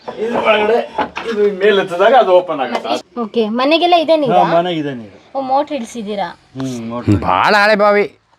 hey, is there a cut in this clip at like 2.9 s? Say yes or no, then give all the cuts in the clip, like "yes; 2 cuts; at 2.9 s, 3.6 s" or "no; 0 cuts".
yes; 1 cut; at 2.9 s